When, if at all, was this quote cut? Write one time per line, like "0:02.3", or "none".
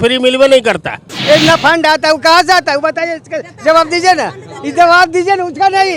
0:01.1